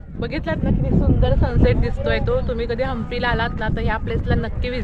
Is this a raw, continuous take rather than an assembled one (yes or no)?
yes